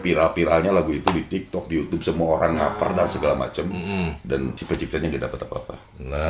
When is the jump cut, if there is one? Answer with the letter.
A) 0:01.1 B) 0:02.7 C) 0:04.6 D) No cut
C